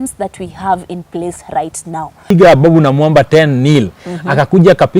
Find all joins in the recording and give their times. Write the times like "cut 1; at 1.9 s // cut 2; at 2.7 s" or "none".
cut 1; at 2.3 s